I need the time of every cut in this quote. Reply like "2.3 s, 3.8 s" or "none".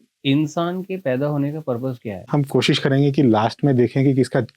2.3 s